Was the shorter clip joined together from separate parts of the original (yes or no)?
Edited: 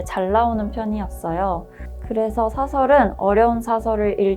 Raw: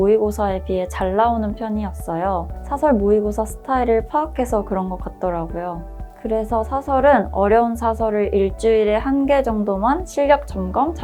yes